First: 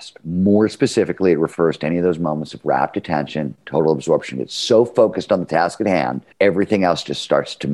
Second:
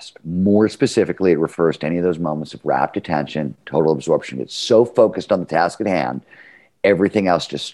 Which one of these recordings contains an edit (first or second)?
first